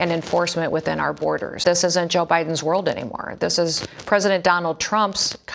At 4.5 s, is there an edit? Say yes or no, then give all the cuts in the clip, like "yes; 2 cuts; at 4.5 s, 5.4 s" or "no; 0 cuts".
no; 1 cut; at 1.6 s